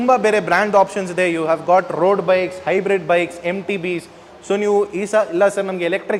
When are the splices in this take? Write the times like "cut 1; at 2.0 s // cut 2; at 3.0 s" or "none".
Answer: none